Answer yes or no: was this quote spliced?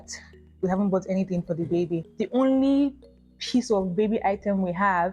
yes